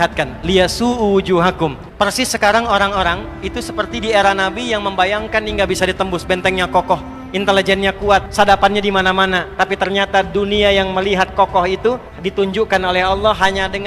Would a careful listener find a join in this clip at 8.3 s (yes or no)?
yes